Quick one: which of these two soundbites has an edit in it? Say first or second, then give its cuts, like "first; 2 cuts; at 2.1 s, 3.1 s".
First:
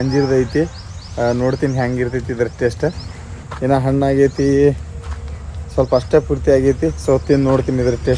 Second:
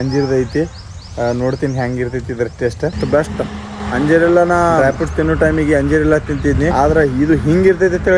second; 4 cuts; at 2.9 s, 3.7 s, 4.8 s, 6.7 s